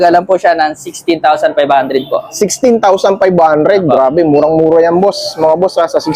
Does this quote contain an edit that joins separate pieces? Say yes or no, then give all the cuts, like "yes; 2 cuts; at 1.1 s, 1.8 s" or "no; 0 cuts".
no; 0 cuts